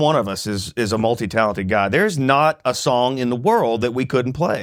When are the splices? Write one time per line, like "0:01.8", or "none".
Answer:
none